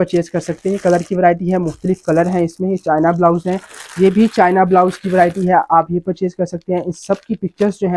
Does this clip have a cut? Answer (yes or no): no